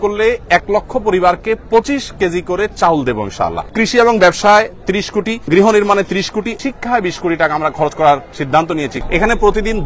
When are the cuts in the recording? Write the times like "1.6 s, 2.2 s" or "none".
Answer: 3.7 s, 5.5 s, 6.5 s, 8.9 s